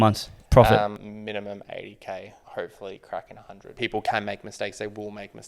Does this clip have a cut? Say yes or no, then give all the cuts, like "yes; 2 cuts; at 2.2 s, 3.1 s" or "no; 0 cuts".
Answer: yes; 3 cuts; at 1.0 s, 2.4 s, 3.7 s